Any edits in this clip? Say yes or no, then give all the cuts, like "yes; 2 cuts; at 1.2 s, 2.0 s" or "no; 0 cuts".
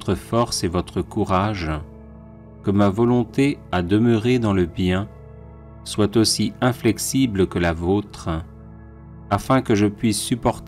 yes; 1 cut; at 9.6 s